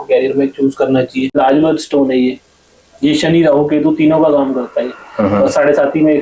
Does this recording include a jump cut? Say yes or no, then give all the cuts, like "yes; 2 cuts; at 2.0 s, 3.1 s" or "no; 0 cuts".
yes; 1 cut; at 1.4 s